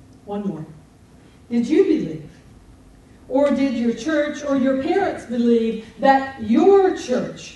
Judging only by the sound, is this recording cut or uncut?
uncut